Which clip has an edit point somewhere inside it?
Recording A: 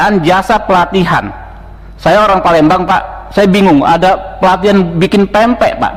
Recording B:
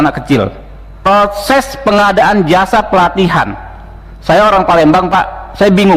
B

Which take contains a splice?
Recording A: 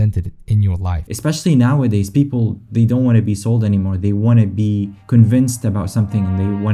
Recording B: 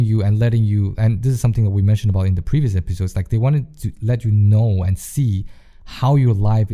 A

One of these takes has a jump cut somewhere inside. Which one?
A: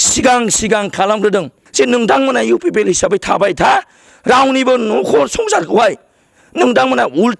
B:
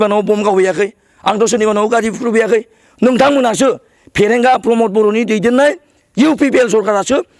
A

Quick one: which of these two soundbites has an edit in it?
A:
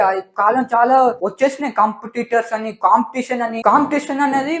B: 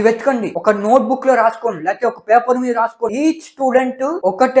B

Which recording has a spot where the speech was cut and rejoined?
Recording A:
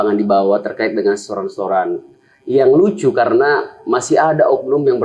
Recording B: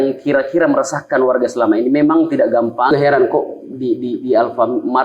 B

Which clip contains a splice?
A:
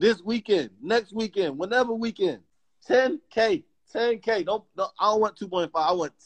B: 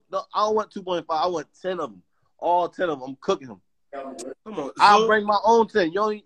A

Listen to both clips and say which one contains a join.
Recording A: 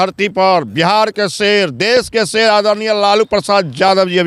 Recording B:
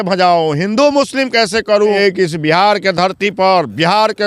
B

